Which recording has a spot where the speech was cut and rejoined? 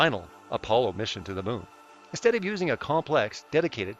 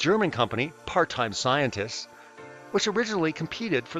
first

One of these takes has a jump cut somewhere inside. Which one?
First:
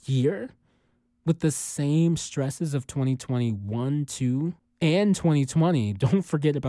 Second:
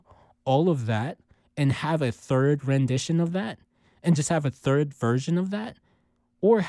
first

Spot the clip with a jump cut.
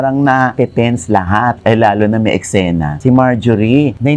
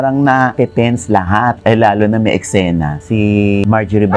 first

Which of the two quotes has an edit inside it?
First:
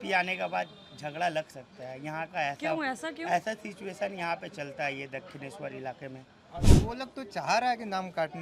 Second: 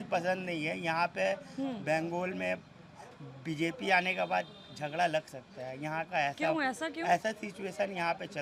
first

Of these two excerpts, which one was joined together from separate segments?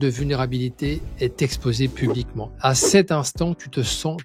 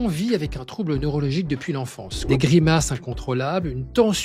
second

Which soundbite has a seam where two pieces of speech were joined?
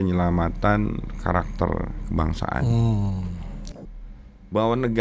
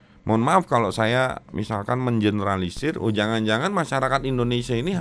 first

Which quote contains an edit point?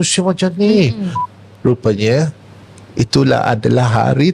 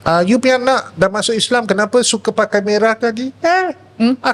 first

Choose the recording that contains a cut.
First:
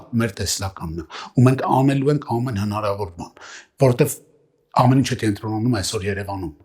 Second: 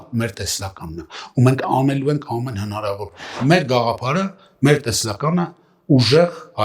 second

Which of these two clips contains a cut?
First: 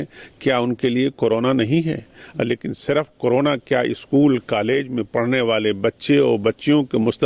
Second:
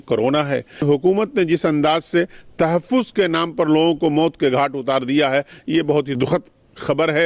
second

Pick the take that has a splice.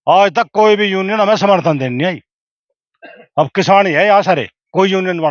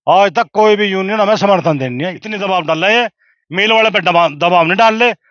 second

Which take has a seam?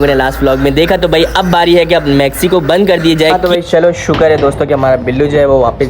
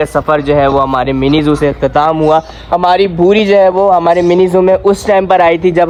first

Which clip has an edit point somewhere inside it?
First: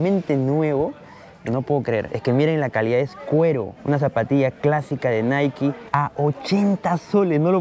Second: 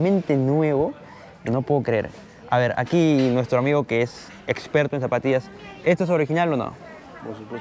first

